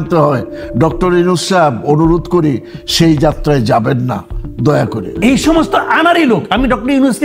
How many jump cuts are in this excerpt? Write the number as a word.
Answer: one